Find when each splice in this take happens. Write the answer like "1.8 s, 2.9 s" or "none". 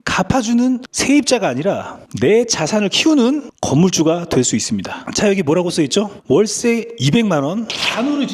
5.0 s